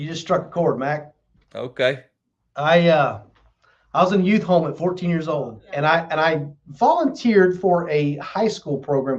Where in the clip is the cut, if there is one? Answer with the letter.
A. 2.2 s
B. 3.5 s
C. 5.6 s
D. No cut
C